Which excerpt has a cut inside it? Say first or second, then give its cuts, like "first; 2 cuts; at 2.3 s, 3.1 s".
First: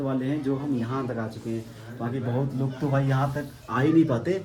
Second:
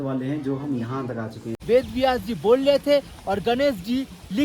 second; 1 cut; at 1.5 s